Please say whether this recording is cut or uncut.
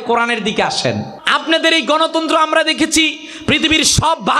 cut